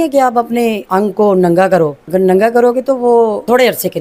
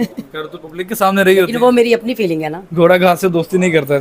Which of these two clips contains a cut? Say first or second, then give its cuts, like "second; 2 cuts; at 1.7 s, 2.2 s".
second; 1 cut; at 2.6 s